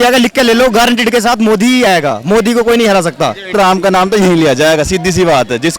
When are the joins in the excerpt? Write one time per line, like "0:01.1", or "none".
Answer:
0:03.5

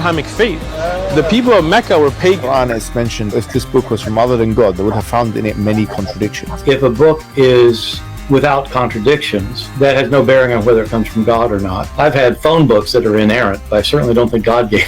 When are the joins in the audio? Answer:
0:03.4

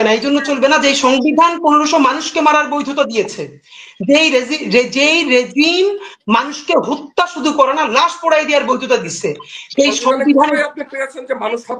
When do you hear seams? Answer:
none

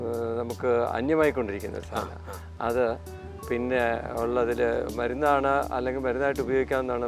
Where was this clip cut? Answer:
none

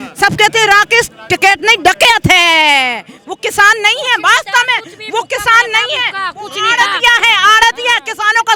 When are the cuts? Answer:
none

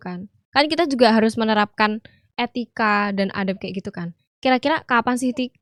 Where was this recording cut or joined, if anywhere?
none

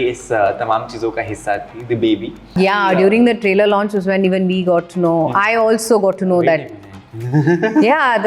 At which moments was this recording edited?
0:02.6

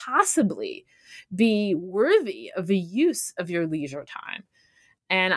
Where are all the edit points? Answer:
none

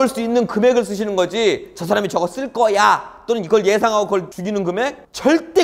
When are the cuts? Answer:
0:04.7

